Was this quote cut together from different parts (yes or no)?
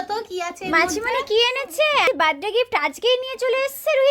yes